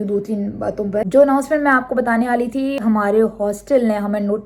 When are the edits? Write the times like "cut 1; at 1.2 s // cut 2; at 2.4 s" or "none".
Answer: cut 1; at 1.1 s // cut 2; at 2.8 s